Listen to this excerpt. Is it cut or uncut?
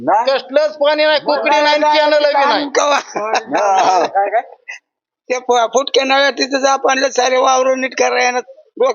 uncut